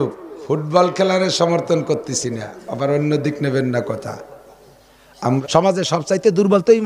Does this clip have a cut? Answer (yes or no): yes